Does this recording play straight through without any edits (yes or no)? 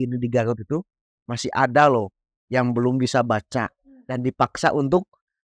yes